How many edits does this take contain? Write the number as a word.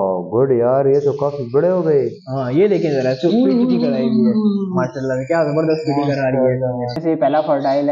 one